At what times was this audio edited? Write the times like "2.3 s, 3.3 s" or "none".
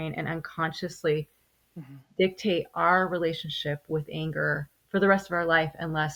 none